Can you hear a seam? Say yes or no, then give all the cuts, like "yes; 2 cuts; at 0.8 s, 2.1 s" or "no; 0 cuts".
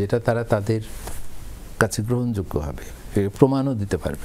no; 0 cuts